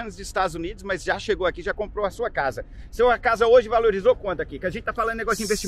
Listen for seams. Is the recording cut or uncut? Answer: uncut